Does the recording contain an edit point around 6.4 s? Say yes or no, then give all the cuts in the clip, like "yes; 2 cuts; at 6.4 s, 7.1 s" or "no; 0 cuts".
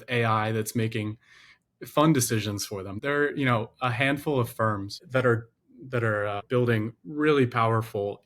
yes; 3 cuts; at 2.9 s, 5.0 s, 6.4 s